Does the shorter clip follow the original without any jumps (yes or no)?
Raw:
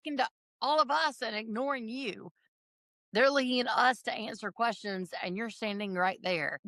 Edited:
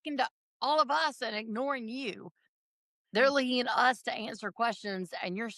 yes